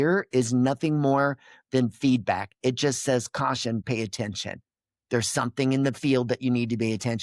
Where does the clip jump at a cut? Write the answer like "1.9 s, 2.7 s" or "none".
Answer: 3.8 s